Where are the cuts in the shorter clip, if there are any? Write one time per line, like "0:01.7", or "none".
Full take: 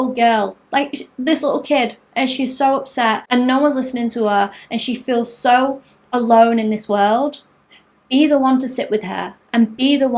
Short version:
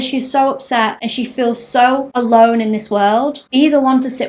0:00.9
0:02.1
0:03.4